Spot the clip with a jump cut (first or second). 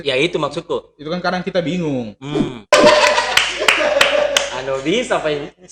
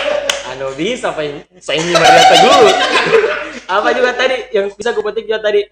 first